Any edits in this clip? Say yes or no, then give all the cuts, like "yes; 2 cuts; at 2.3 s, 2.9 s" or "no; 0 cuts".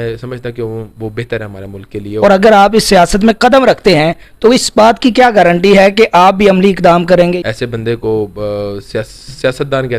yes; 2 cuts; at 2.1 s, 7.5 s